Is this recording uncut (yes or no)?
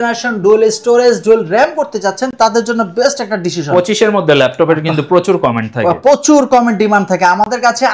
yes